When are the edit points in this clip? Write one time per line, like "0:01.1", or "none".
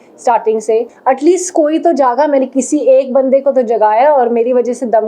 0:00.9